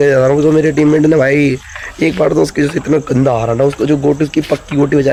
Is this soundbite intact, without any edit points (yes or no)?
yes